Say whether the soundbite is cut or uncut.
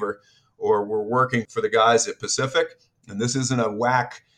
cut